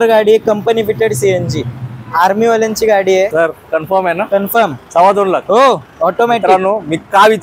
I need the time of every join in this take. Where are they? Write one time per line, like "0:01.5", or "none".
0:03.3